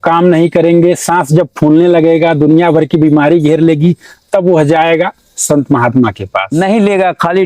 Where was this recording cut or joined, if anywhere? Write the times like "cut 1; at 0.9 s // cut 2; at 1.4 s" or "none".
cut 1; at 6.5 s